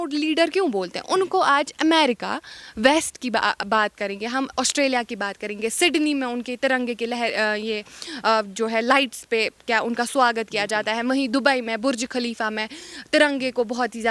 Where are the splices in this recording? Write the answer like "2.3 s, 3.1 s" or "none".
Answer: none